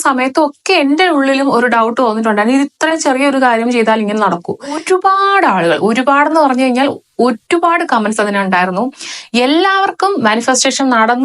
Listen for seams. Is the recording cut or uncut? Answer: cut